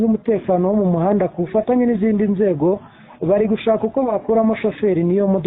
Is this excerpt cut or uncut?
uncut